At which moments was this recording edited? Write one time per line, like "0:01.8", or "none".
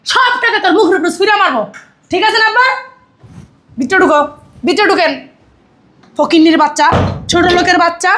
none